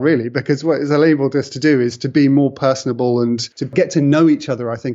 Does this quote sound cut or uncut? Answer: cut